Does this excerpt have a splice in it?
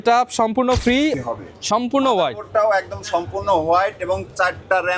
yes; 1 cut; at 1.1 s

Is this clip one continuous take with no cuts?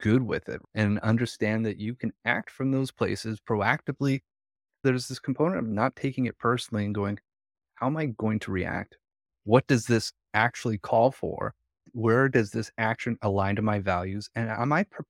yes; 0 cuts

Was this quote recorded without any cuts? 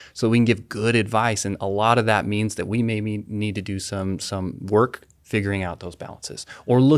yes; 0 cuts

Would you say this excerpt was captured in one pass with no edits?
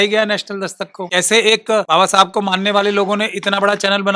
no; 2 cuts; at 1.0 s, 1.9 s

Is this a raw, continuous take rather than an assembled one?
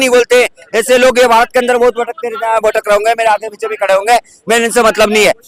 yes; 0 cuts

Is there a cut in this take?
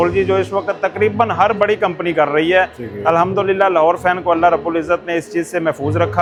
no; 0 cuts

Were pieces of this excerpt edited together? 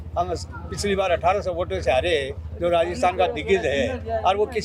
no; 0 cuts

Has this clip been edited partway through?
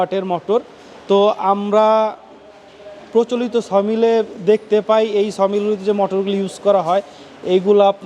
no; 0 cuts

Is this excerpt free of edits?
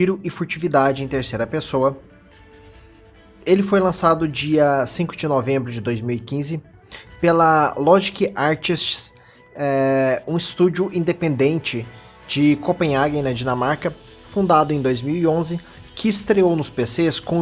yes; 0 cuts

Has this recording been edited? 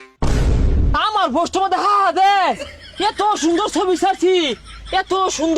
yes; 1 cut; at 0.9 s

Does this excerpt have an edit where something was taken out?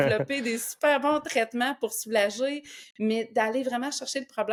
no; 0 cuts

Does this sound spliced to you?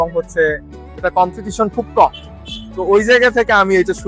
no; 0 cuts

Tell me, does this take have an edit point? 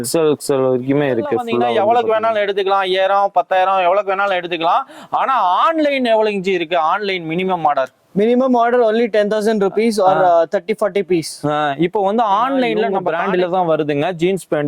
yes; 2 cuts; at 1.7 s, 13.1 s

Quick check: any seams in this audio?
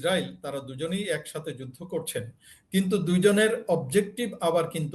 no; 0 cuts

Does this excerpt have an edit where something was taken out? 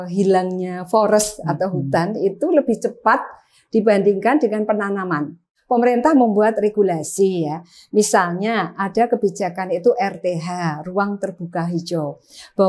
yes; 1 cut; at 5.5 s

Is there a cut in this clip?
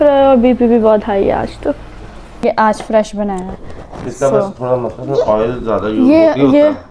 yes; 1 cut; at 2.4 s

